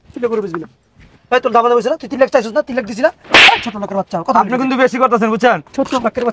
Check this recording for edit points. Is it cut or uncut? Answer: uncut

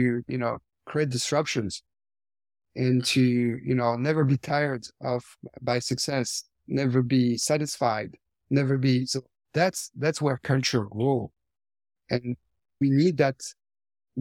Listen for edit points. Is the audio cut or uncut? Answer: cut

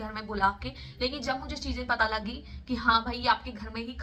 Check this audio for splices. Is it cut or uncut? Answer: uncut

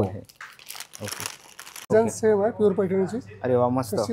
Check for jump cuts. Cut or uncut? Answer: cut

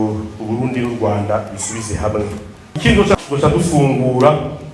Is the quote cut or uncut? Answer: cut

